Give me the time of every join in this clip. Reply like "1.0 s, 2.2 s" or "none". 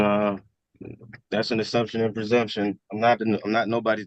none